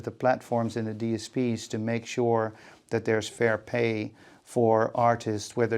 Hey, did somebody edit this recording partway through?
no; 0 cuts

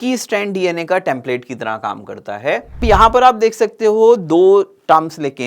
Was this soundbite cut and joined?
yes; 1 cut; at 2.8 s

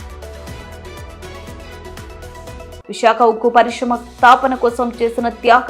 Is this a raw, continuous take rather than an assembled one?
no; 1 cut; at 1.1 s

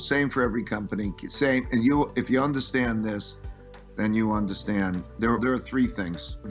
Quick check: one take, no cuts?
yes; 0 cuts

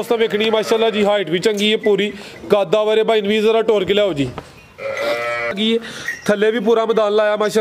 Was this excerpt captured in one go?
no; 1 cut; at 5.5 s

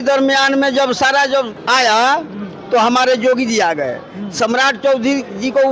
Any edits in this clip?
yes; 1 cut; at 1.6 s

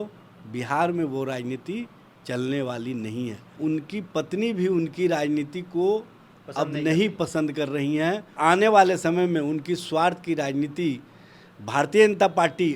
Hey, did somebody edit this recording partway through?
yes; 2 cuts; at 3.5 s, 8.3 s

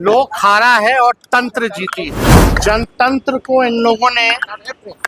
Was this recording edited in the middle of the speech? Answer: yes; 1 cut; at 2.5 s

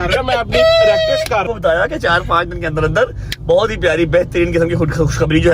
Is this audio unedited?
no; 1 cut; at 1.4 s

